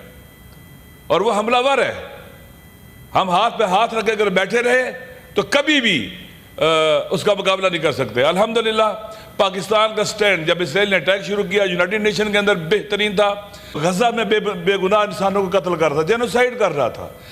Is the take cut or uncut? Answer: cut